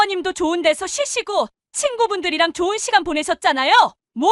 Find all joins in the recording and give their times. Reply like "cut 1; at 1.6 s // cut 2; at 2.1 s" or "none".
none